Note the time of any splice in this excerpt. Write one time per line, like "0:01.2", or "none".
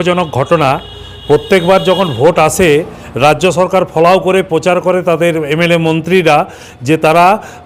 none